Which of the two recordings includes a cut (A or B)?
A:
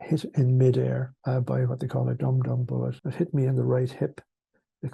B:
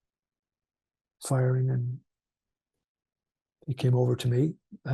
A